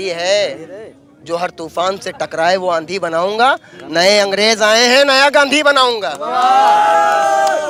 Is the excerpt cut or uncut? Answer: uncut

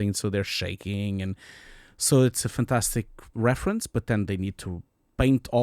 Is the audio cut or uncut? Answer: cut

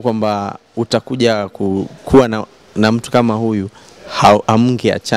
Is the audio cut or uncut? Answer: uncut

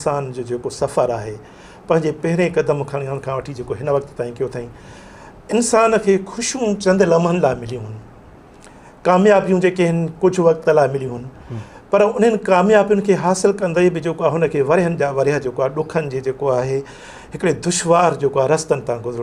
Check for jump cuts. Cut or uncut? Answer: uncut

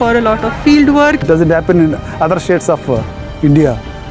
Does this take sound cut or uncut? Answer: cut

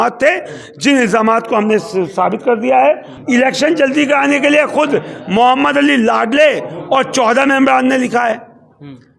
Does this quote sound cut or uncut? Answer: cut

